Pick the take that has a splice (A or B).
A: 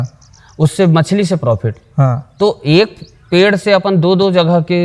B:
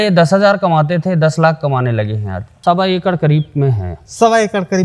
B